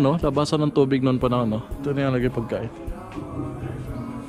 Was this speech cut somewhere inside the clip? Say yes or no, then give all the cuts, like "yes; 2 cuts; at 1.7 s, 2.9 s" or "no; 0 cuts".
yes; 1 cut; at 1.9 s